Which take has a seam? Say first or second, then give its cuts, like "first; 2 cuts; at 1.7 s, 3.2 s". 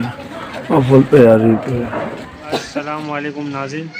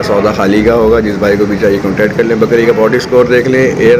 first; 1 cut; at 2.7 s